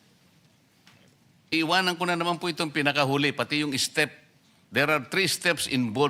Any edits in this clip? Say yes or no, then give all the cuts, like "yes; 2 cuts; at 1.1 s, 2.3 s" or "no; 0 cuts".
yes; 1 cut; at 1.5 s